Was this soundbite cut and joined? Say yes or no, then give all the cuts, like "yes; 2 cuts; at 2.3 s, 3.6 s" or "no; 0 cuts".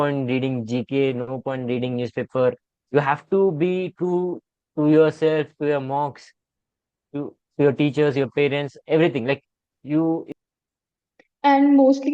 yes; 1 cut; at 10.3 s